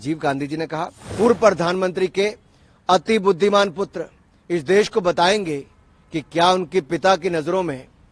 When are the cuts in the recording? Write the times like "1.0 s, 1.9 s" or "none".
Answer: 1.0 s